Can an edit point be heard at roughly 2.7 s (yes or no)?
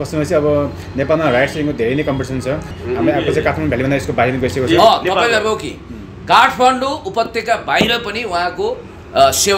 yes